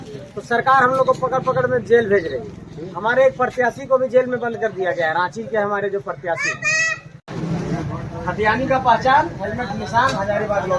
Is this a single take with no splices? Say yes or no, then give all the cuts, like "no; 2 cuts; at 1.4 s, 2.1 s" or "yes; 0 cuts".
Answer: no; 1 cut; at 7.3 s